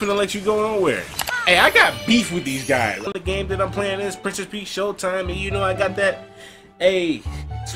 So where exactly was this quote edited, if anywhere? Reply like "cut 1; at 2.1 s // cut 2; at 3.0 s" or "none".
cut 1; at 1.3 s // cut 2; at 3.1 s